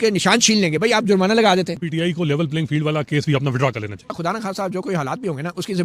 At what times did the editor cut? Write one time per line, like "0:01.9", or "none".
0:01.8
0:04.1